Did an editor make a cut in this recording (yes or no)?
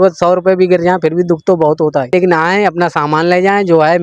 yes